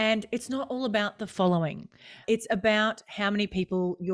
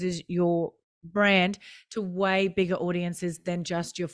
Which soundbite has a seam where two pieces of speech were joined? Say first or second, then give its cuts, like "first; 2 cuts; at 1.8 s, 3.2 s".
first; 1 cut; at 2.2 s